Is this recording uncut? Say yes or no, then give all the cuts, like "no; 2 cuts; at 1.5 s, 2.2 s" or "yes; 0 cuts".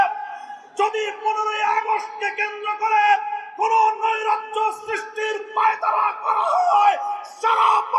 yes; 0 cuts